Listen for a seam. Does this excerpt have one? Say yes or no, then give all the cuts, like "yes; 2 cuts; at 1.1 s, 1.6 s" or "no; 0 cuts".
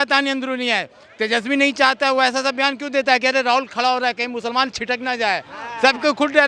no; 0 cuts